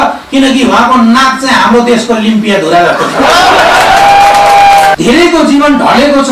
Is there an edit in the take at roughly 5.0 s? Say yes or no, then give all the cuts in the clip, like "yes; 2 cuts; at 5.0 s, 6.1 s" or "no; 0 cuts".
yes; 1 cut; at 5.0 s